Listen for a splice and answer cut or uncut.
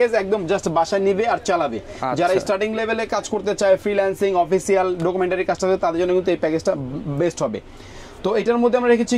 uncut